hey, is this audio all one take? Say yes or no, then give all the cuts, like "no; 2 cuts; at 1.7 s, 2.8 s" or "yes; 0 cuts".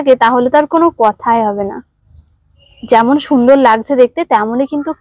yes; 0 cuts